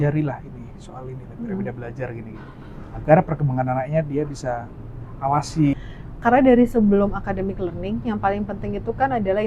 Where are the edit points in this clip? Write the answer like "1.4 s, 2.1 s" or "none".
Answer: 5.9 s